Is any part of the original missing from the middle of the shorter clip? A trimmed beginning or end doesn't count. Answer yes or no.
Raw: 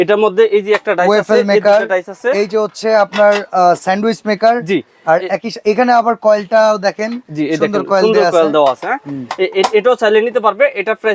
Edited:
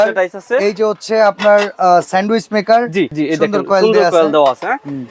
yes